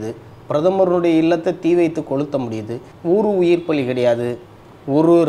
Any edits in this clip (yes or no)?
yes